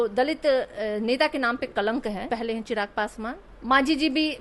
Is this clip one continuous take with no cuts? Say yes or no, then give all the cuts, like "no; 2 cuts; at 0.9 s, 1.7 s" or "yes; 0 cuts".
no; 2 cuts; at 2.3 s, 3.5 s